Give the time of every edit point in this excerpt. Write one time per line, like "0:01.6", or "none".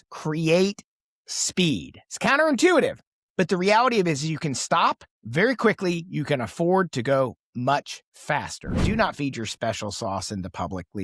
0:02.0
0:08.8